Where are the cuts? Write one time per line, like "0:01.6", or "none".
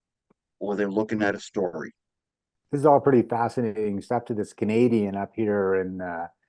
none